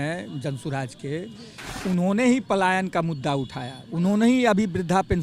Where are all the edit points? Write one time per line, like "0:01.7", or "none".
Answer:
none